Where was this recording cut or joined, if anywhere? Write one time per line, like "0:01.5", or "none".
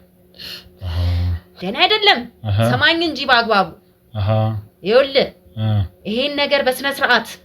0:01.5